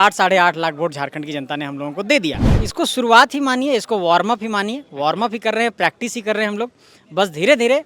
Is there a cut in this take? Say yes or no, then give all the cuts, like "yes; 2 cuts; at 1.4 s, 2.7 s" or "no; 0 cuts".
yes; 1 cut; at 2.5 s